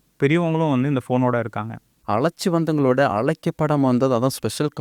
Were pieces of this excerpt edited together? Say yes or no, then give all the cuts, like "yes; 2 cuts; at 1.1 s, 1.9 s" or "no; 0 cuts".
yes; 1 cut; at 1.9 s